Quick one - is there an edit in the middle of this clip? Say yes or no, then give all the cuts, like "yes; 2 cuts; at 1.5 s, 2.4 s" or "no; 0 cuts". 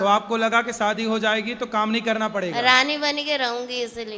no; 0 cuts